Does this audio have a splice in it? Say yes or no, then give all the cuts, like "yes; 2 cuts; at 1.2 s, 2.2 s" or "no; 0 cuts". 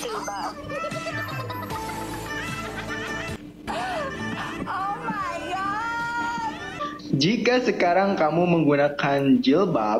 yes; 2 cuts; at 3.6 s, 6.9 s